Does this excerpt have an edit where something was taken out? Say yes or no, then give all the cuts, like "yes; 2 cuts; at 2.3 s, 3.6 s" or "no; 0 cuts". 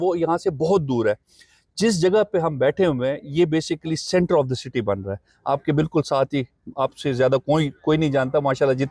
no; 0 cuts